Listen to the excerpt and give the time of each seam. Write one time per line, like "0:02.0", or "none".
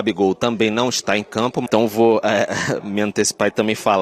0:01.6